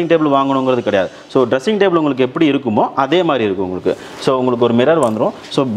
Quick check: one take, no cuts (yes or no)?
yes